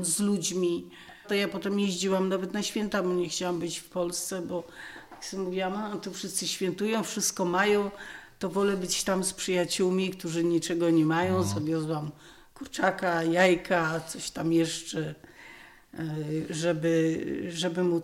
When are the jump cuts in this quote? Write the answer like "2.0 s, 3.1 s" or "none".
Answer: 1.2 s